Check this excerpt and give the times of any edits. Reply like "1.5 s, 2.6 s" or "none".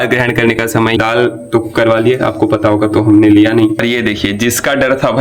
1.0 s, 3.8 s